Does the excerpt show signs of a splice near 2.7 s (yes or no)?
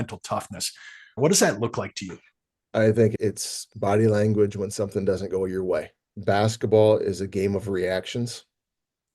no